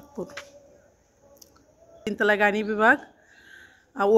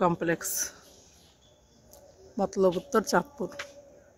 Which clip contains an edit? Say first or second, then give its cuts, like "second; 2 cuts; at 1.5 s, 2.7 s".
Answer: first; 1 cut; at 2.0 s